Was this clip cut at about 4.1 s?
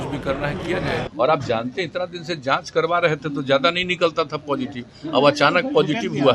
no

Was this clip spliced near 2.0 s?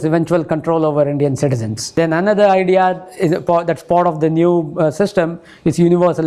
yes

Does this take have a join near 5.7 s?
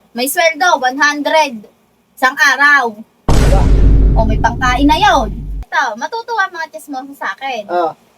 yes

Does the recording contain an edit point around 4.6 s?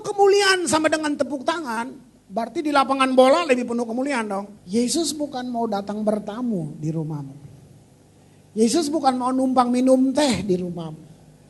yes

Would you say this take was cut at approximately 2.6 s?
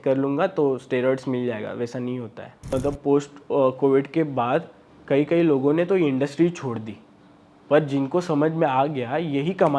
yes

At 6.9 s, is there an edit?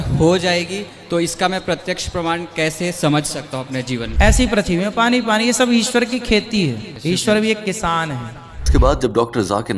yes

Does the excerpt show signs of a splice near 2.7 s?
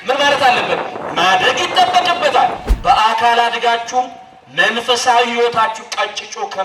yes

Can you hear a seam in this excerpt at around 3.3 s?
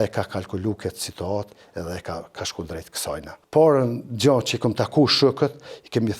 yes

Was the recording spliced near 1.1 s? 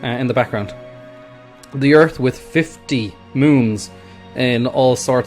yes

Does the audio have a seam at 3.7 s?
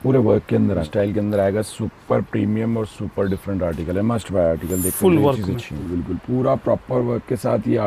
no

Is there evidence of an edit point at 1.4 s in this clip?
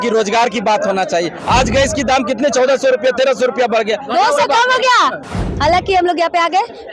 yes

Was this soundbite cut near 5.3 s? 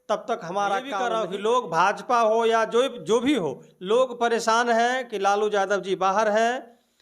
no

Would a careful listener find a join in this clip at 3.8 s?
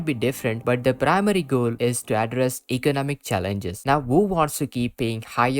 yes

